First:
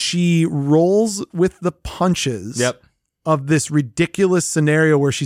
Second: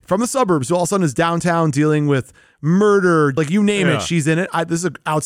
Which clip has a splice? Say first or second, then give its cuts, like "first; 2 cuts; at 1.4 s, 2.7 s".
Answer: second; 1 cut; at 3.3 s